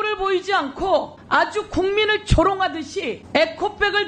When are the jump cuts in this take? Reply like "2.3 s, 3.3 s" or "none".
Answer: 1.2 s, 3.2 s